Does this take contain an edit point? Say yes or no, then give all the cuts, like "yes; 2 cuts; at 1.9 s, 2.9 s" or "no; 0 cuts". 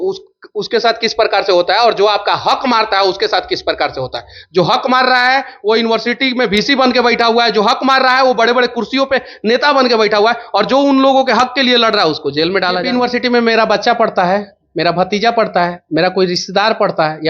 yes; 1 cut; at 12.9 s